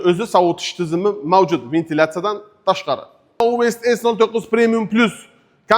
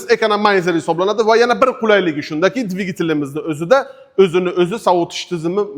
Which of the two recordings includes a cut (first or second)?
first